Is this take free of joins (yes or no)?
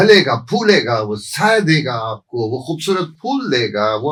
yes